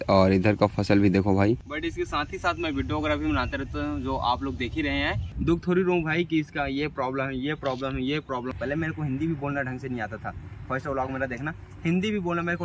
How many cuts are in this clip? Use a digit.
3